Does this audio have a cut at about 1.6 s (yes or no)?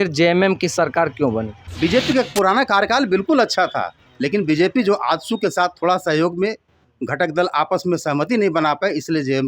yes